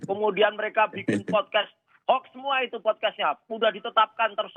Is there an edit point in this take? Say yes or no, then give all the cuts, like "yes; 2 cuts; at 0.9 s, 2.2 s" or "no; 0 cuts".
no; 0 cuts